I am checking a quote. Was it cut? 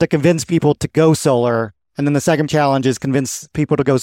yes; 1 cut; at 2.5 s

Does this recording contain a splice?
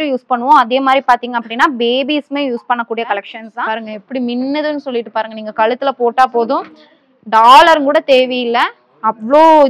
yes; 1 cut; at 3.4 s

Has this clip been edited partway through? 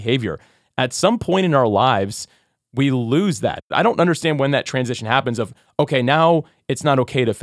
yes; 1 cut; at 3.7 s

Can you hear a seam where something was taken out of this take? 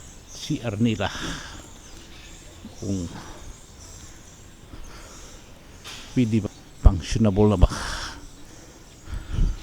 yes; 1 cut; at 6.4 s

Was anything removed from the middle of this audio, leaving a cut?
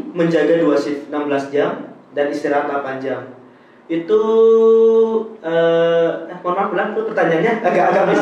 no; 0 cuts

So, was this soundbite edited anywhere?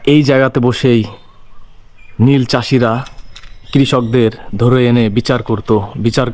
no; 0 cuts

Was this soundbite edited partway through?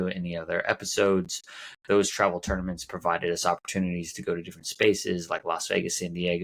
no; 0 cuts

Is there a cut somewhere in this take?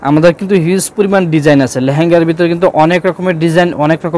no; 0 cuts

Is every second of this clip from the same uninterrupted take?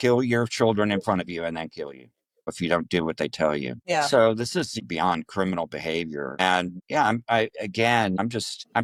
yes; 0 cuts

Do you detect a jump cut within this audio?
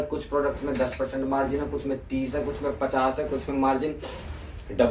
no; 0 cuts

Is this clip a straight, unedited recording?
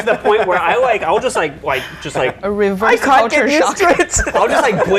yes; 0 cuts

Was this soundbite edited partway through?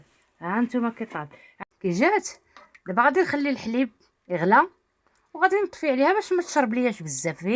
yes; 1 cut; at 1.6 s

